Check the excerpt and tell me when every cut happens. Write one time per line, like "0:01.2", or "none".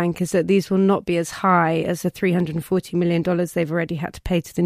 none